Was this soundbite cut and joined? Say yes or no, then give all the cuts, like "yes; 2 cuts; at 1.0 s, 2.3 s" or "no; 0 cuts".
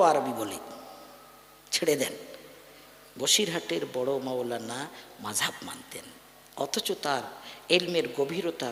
no; 0 cuts